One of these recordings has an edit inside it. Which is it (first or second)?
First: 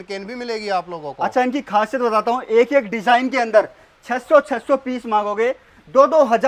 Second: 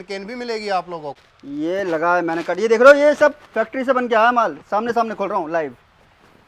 second